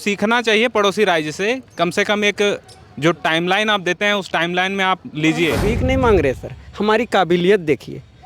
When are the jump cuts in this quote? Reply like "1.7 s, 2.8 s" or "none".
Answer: 5.7 s